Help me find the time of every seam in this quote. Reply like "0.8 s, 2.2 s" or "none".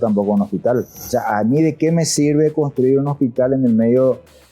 1.0 s